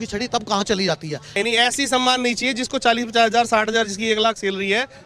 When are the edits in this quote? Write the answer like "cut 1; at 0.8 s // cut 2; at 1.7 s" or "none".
cut 1; at 1.3 s